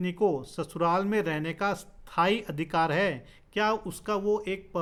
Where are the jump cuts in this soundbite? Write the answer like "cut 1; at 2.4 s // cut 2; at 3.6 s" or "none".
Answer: none